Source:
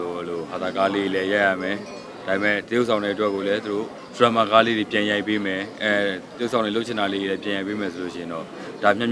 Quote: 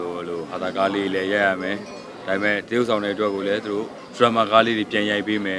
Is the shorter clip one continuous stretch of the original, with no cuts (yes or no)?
yes